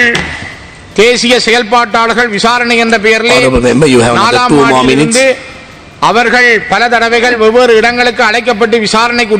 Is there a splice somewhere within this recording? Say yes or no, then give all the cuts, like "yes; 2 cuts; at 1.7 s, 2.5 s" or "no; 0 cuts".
no; 0 cuts